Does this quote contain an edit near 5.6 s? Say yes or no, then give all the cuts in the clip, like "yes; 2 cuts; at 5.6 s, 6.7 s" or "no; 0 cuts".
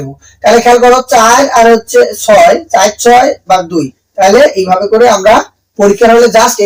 no; 0 cuts